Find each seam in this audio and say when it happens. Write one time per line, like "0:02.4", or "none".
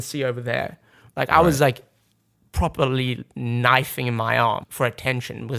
0:04.7